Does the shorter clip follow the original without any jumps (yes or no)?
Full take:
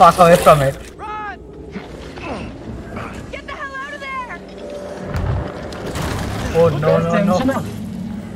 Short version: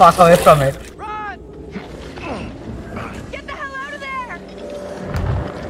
yes